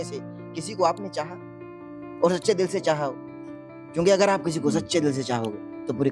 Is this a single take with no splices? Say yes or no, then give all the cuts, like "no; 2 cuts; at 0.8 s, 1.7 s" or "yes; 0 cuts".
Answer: yes; 0 cuts